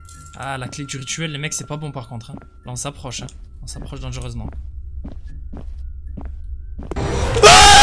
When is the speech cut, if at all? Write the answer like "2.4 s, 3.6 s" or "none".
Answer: 2.6 s, 3.3 s